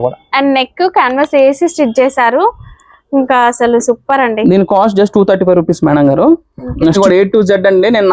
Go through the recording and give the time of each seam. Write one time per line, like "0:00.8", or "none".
0:07.0

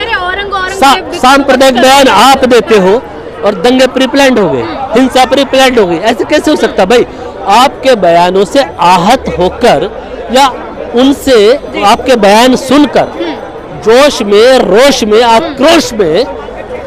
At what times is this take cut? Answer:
none

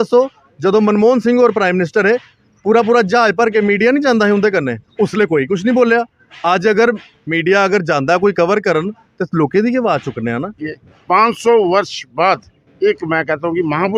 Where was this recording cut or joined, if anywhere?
0:10.7

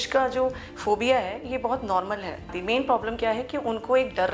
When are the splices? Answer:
0:02.5

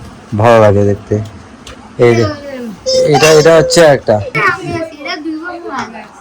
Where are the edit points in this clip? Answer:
0:04.4

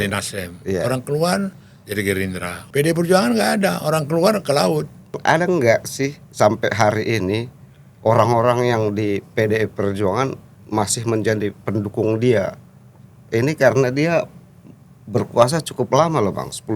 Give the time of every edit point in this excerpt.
0:02.5
0:05.1

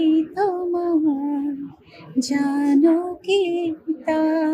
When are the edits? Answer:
none

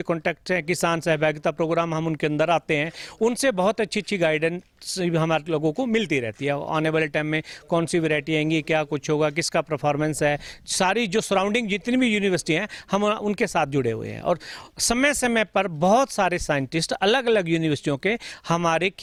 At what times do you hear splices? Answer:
none

